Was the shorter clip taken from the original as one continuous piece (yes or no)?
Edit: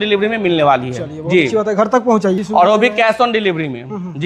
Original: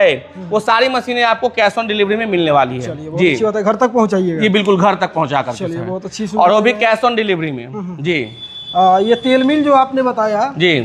no